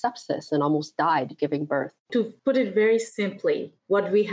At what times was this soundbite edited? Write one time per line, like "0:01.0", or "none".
0:02.2